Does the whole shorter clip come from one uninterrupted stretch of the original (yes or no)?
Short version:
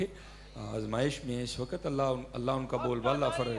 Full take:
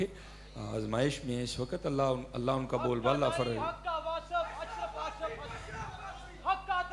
yes